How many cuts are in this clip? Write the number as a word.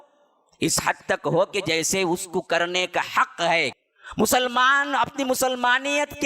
one